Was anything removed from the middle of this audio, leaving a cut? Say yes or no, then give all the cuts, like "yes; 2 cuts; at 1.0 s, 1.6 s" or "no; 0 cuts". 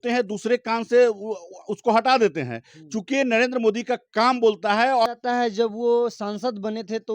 yes; 1 cut; at 5.1 s